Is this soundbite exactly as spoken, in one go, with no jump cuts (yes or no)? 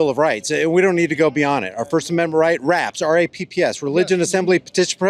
yes